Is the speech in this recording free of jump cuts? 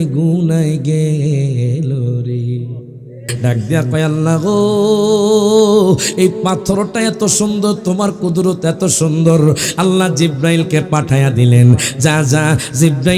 no; 1 cut; at 3.3 s

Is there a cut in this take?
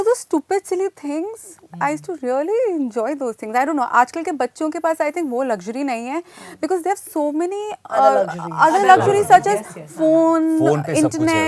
no; 0 cuts

